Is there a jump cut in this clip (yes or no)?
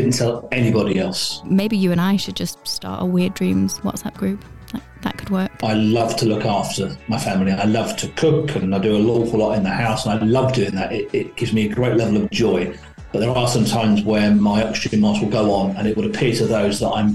yes